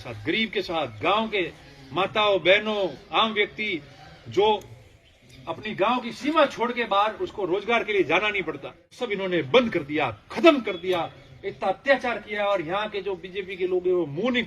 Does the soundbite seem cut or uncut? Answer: cut